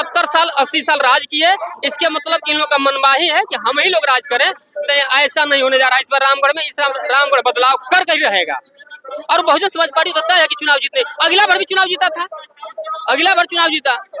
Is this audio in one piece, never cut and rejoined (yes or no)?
yes